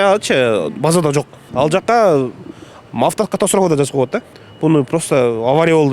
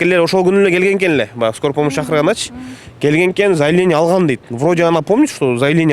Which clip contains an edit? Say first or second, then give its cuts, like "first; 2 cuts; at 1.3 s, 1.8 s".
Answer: first; 2 cuts; at 1.4 s, 4.4 s